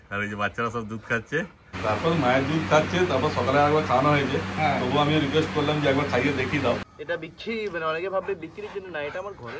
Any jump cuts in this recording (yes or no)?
yes